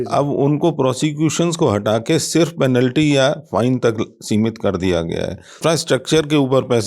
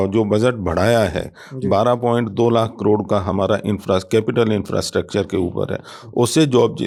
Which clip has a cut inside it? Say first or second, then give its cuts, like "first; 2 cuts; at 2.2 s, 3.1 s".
first; 1 cut; at 5.6 s